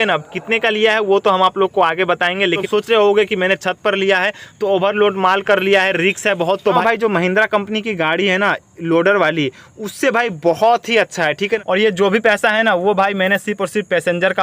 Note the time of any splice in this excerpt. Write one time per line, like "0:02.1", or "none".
0:02.6
0:06.8
0:11.6

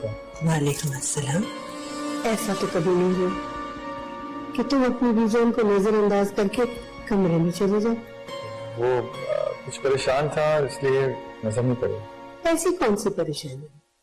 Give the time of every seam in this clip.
none

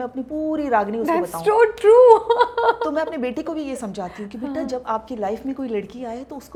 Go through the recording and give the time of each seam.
none

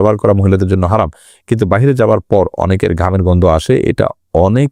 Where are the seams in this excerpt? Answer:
none

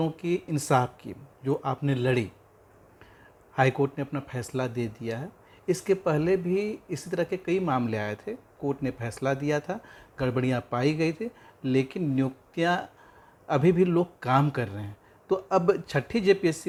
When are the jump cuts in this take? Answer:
none

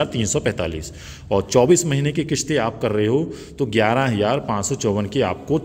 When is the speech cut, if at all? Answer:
none

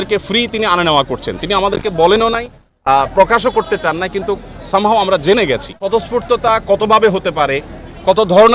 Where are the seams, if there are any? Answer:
0:05.9

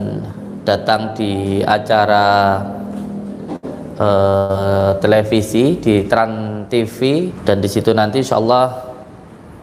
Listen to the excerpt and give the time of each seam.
0:07.3

